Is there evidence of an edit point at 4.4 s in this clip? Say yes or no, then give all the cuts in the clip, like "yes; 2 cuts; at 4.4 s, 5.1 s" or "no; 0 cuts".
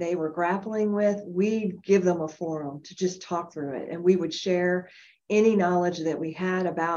no; 0 cuts